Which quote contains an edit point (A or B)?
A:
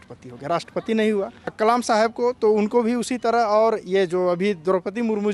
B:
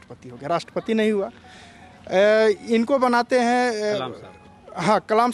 A